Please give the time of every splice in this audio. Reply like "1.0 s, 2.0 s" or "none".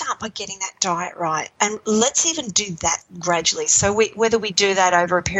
1.5 s, 3.1 s